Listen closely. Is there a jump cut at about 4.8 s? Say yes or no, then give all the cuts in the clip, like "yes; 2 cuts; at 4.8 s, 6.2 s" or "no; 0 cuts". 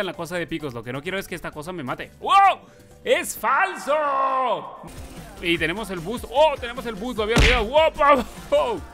yes; 1 cut; at 4.8 s